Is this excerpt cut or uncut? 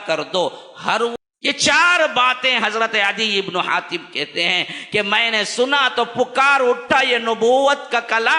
cut